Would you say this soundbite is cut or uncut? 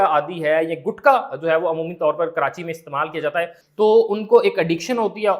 cut